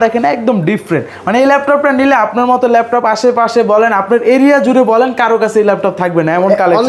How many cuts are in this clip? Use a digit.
0